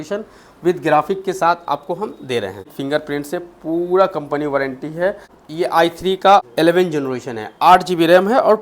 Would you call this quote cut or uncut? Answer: cut